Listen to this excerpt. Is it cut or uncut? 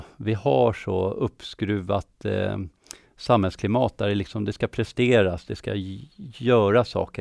uncut